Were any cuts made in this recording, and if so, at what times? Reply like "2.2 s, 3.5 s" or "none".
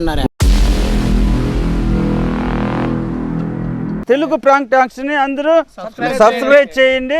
4.0 s